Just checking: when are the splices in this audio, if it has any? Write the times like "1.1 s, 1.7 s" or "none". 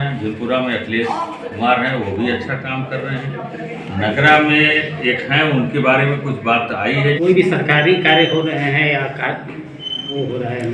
7.2 s